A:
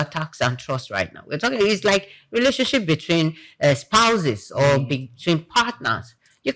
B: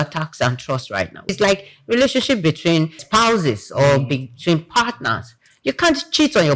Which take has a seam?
B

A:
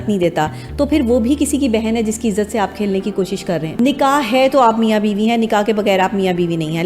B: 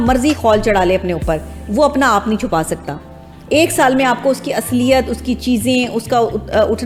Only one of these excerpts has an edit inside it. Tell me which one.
A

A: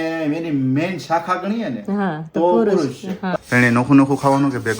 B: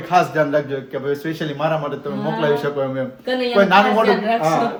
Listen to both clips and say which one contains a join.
A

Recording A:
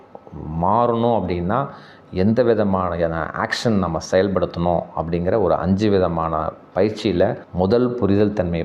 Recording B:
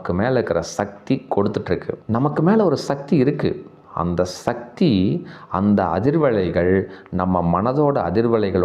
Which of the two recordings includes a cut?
B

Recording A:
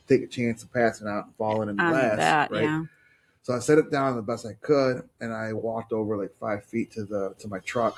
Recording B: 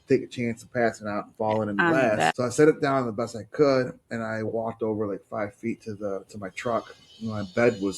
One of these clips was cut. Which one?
B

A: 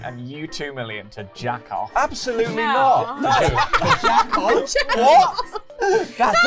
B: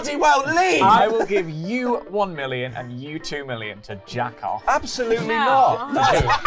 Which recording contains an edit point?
B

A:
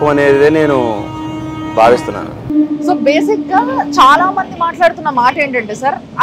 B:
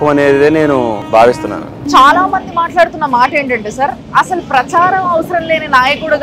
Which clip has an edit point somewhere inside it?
B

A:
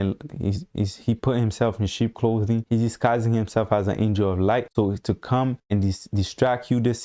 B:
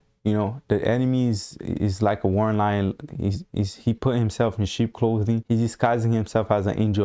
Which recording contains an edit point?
A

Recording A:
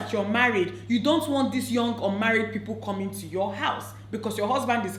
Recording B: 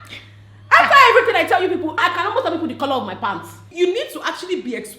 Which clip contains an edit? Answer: B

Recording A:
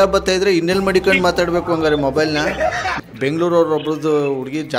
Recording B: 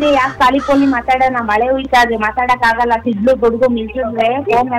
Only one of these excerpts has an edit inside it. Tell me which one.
A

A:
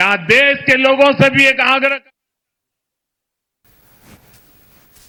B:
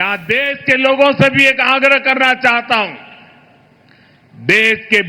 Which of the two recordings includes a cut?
B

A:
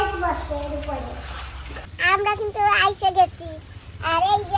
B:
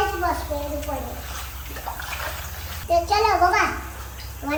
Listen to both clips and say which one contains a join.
A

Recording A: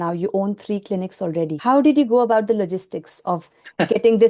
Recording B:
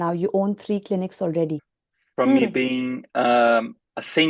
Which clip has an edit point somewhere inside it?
A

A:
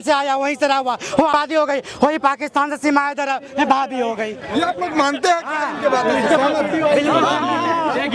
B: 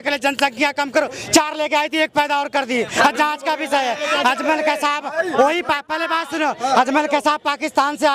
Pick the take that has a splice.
A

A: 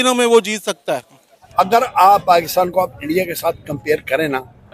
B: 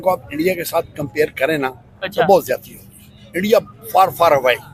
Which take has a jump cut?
A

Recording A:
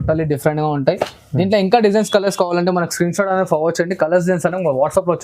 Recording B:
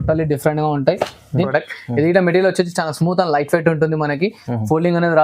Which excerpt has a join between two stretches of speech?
B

